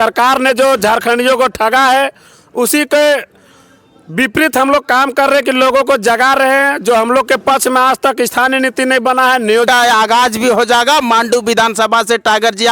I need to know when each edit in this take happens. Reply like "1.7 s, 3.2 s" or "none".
9.7 s